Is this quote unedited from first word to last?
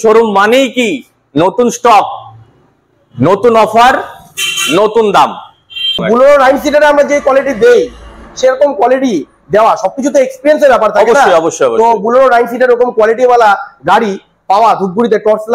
no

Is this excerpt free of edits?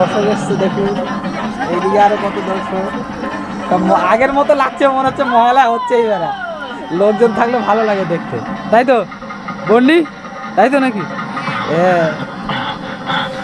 yes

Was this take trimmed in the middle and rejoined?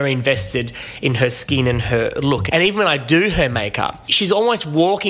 yes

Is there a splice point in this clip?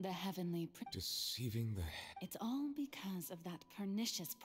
yes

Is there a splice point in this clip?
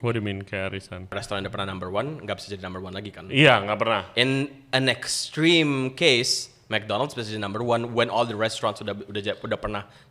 yes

